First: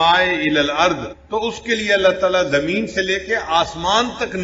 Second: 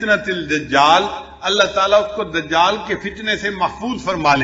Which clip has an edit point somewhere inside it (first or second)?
first